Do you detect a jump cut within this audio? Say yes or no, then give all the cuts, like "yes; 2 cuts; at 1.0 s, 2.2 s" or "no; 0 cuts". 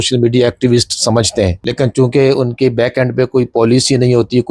yes; 1 cut; at 1.6 s